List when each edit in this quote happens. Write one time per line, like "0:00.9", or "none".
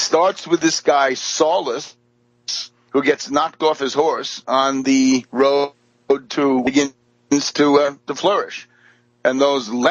none

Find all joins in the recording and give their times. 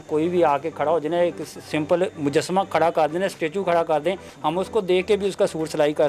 none

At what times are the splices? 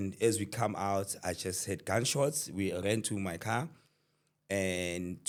none

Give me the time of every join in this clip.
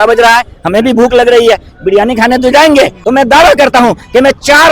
0:03.0

